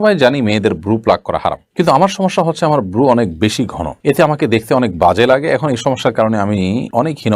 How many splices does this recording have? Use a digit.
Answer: 0